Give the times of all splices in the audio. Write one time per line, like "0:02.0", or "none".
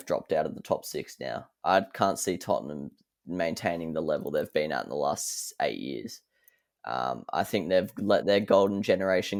none